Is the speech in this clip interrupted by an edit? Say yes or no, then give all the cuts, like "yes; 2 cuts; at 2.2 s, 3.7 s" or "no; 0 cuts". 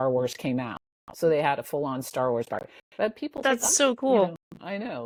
no; 0 cuts